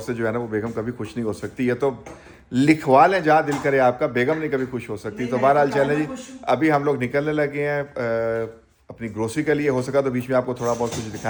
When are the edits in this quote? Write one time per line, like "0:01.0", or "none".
none